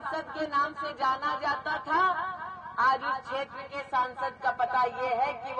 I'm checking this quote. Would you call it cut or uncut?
uncut